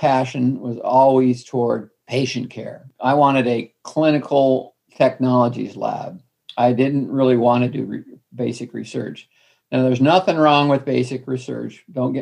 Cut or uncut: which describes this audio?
cut